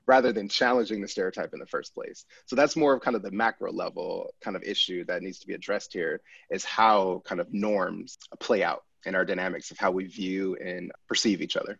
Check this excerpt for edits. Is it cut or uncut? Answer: cut